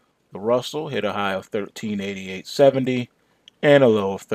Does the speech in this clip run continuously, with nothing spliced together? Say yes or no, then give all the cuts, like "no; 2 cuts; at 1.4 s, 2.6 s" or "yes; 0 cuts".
yes; 0 cuts